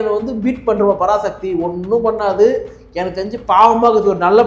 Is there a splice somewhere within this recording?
no; 0 cuts

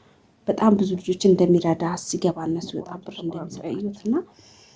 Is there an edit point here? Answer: yes; 1 cut; at 3.1 s

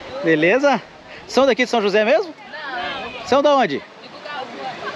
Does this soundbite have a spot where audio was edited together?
no; 0 cuts

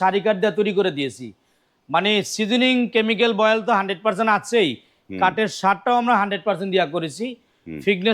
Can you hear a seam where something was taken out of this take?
no; 0 cuts

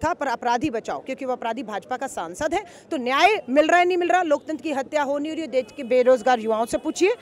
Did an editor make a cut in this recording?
no; 0 cuts

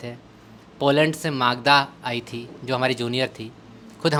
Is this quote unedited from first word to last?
yes; 0 cuts

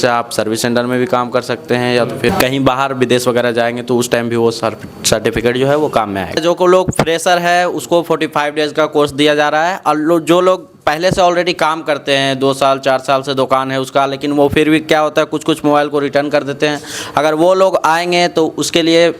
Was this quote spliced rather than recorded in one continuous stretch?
yes; 1 cut; at 6.4 s

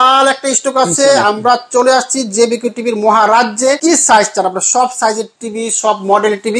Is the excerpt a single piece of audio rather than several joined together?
no; 1 cut; at 3.8 s

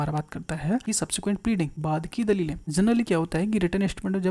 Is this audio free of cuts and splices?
no; 3 cuts; at 0.8 s, 1.8 s, 2.6 s

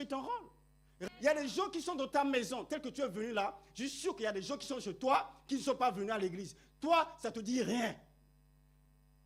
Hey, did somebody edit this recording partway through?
yes; 1 cut; at 0.9 s

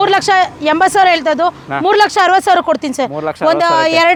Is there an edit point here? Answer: no; 0 cuts

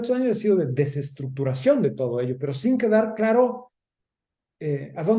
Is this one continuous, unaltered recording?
yes; 0 cuts

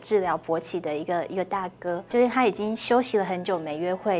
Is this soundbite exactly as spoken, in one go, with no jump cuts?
no; 1 cut; at 2.1 s

